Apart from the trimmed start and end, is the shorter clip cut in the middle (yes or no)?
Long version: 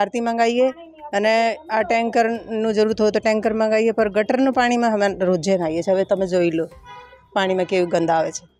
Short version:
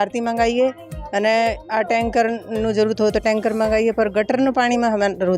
no